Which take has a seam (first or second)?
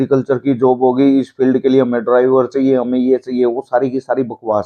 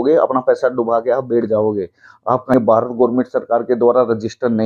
second